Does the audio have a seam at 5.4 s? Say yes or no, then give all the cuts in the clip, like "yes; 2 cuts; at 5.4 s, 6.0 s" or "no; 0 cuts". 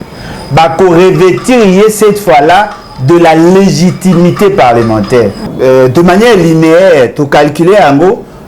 yes; 1 cut; at 5.4 s